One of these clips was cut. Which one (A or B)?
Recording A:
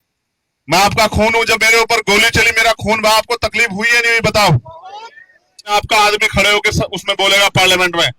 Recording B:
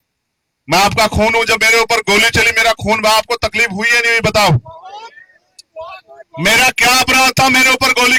A